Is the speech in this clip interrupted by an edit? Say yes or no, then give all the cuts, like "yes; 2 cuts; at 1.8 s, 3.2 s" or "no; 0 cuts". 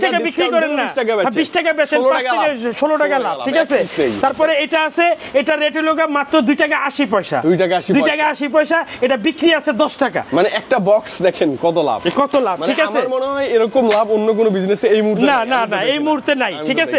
no; 0 cuts